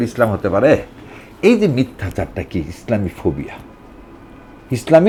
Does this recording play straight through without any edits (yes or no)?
yes